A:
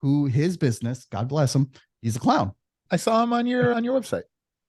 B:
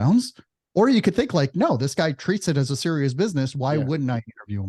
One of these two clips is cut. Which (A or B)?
A